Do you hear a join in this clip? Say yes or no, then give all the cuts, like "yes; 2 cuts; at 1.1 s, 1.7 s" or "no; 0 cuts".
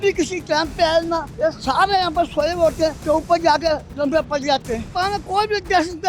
yes; 3 cuts; at 1.3 s, 3.0 s, 4.9 s